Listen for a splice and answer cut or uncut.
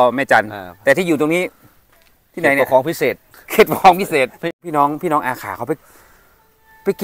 cut